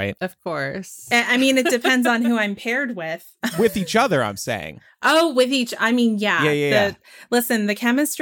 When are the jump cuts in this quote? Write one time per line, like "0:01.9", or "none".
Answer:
0:01.1
0:03.5

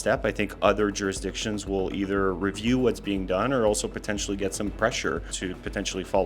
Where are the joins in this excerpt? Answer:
0:05.3

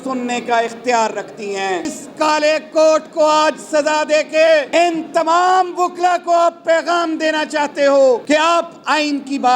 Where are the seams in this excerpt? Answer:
0:02.0
0:04.7
0:08.2

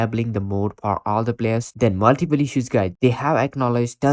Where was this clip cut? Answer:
0:01.7
0:02.9

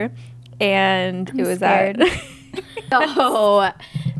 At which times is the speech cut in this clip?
0:02.9

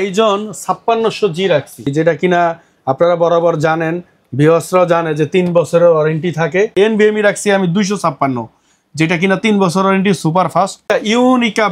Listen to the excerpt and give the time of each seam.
0:01.9
0:06.7
0:10.8

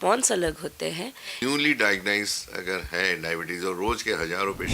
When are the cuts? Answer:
0:01.3

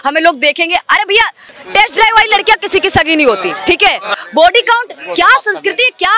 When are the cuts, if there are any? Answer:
0:01.6
0:04.1

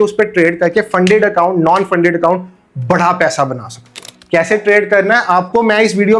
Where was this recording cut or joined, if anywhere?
0:04.1

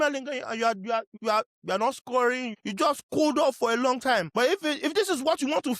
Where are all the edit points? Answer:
0:01.1
0:02.5
0:04.3

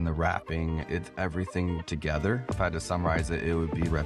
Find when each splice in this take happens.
0:00.8
0:02.5

